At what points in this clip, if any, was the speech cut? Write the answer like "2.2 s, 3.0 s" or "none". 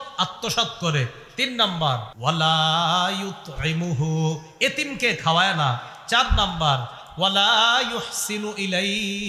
2.1 s